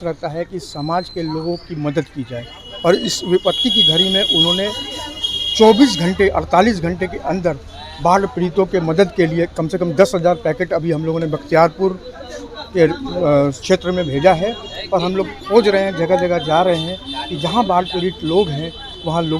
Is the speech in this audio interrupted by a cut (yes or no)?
no